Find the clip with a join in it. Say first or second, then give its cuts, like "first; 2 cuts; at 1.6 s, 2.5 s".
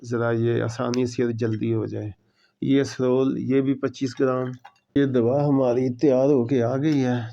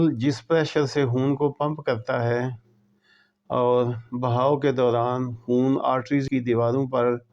first; 1 cut; at 5.0 s